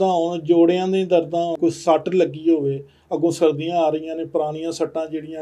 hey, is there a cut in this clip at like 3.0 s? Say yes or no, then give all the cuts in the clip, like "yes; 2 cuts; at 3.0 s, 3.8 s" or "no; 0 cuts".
no; 1 cut; at 1.5 s